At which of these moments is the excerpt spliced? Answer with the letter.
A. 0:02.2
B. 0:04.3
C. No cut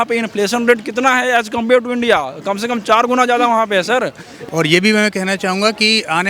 B